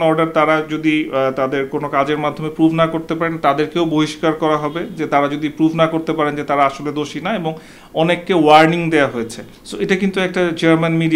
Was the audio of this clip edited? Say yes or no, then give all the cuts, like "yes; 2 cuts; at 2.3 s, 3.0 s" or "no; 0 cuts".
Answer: no; 0 cuts